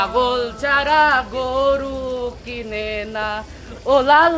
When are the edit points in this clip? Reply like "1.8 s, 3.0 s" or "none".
none